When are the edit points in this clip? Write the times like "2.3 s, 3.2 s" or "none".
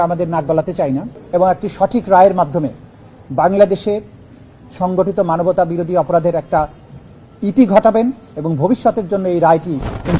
1.2 s